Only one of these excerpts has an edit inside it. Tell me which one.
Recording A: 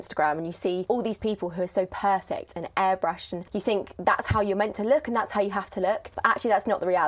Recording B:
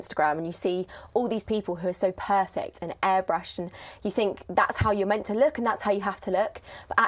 A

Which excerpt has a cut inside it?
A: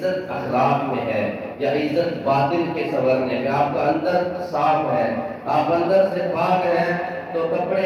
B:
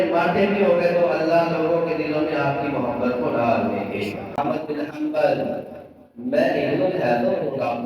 B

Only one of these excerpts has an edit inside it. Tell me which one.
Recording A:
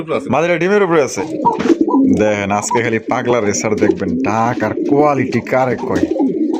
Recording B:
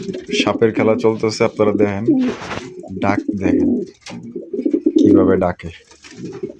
A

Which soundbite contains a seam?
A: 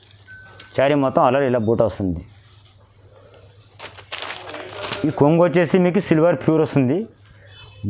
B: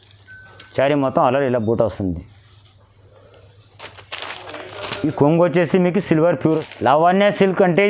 B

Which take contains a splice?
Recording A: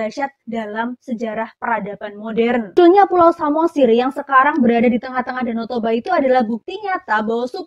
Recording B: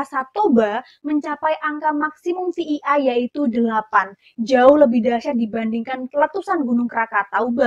A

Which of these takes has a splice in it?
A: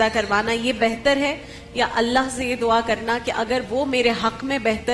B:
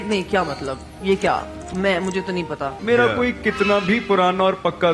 B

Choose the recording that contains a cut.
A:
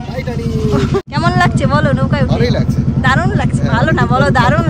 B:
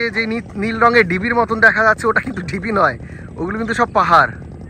A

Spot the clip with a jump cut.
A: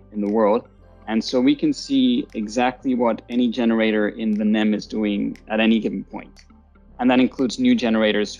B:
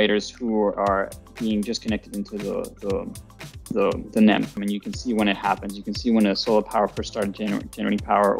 B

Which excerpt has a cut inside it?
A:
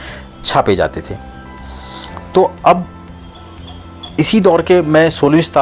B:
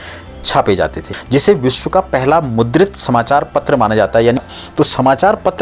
B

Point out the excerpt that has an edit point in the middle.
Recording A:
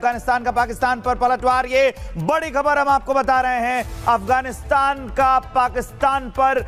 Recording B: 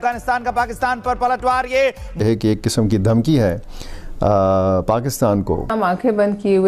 B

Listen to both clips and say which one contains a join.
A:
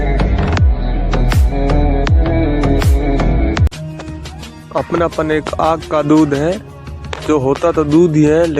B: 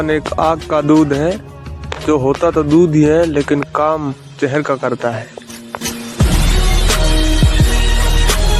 A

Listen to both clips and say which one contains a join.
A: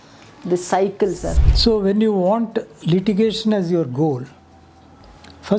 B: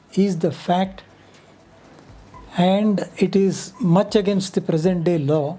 A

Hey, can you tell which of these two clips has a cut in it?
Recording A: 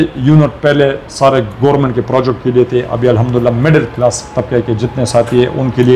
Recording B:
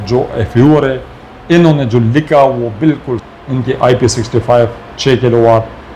B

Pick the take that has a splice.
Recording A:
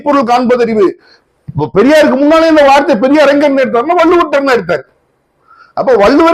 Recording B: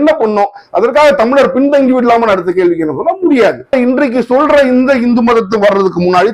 B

